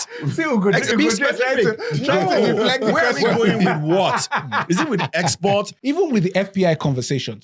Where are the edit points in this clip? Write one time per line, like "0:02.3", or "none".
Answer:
0:05.7